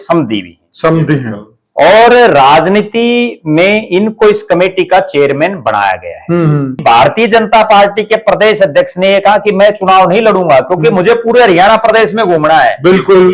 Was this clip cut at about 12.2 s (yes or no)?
no